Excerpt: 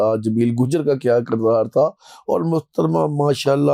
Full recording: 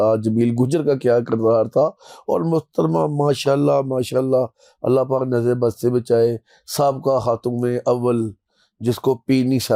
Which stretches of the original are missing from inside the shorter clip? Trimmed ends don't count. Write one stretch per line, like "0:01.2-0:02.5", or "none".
none